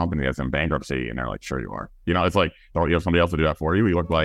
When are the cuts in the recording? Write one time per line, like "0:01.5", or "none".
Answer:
none